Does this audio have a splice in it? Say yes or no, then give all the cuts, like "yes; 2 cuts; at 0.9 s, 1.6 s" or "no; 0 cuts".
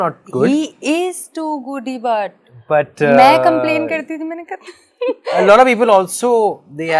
no; 0 cuts